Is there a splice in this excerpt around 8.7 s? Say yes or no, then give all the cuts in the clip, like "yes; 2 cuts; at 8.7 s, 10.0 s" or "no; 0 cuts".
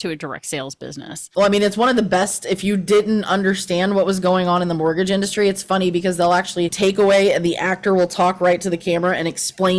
no; 2 cuts; at 1.2 s, 6.7 s